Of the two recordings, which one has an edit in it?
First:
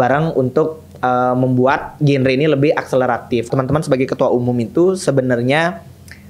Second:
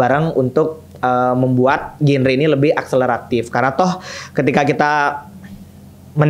first; 1 cut; at 3.5 s

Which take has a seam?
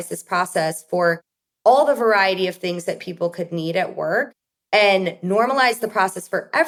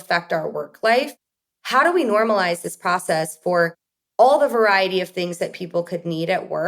second; 1 cut; at 1.4 s

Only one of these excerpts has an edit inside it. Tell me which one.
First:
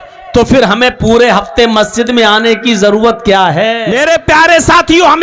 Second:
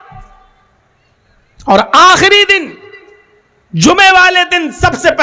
first; 1 cut; at 3.8 s

